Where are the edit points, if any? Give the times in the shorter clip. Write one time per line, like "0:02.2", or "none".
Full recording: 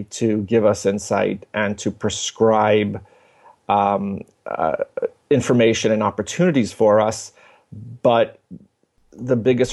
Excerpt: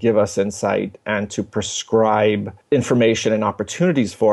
0:02.6